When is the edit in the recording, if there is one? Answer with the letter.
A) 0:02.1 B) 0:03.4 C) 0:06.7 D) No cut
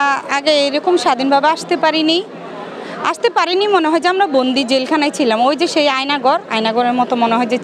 D